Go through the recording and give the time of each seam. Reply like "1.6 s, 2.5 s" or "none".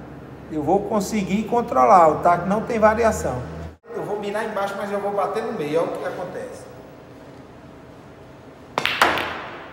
4.0 s